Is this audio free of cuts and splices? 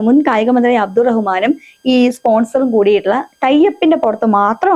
yes; 0 cuts

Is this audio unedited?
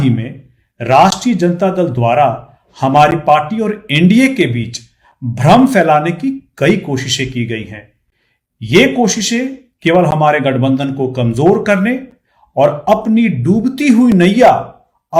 yes; 0 cuts

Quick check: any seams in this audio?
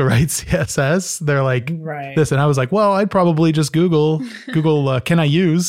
no; 0 cuts

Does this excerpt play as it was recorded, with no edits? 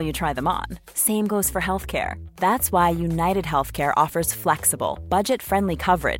yes; 0 cuts

